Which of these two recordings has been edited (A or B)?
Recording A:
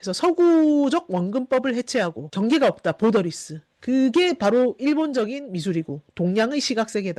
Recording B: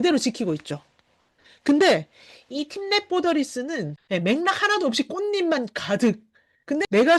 B